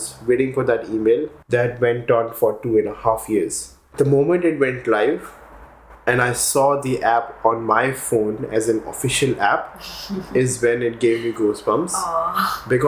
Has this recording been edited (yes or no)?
yes